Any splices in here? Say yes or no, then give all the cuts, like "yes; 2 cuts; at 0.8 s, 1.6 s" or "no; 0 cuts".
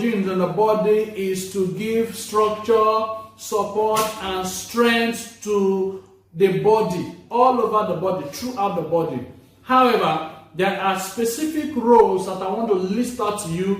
no; 0 cuts